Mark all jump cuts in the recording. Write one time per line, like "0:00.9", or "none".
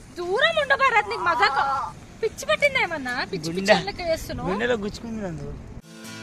none